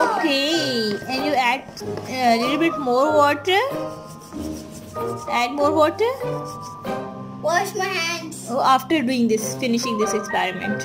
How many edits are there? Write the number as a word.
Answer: two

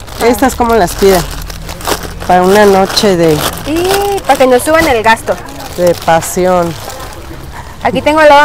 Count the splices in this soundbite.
zero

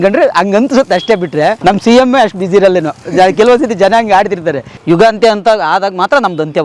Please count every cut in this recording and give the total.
two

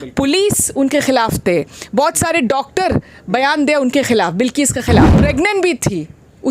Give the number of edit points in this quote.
one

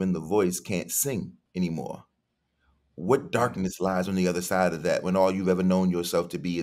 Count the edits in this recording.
one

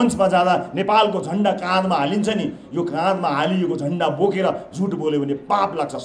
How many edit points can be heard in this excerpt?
zero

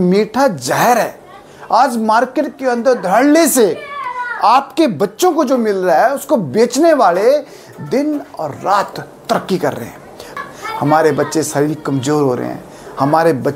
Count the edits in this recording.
one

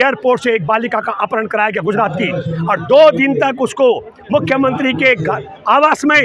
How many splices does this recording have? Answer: zero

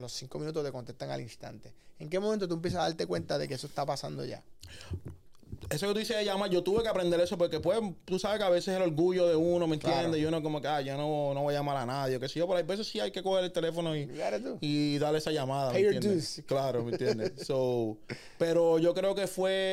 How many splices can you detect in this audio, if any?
zero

